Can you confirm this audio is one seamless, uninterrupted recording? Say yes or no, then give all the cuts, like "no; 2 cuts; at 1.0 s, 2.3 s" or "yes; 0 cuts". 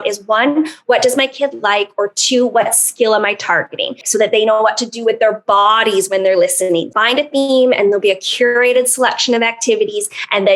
no; 2 cuts; at 4.0 s, 6.9 s